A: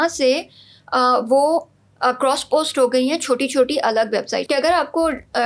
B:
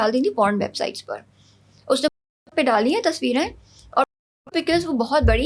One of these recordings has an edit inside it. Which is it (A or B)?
A